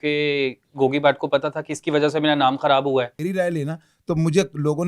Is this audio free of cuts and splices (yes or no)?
no